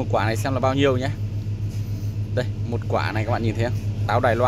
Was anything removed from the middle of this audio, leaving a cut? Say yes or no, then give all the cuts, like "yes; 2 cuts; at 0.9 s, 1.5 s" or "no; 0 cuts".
no; 0 cuts